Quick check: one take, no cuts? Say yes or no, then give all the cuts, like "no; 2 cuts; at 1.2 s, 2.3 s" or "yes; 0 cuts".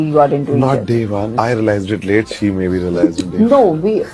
no; 1 cut; at 1.3 s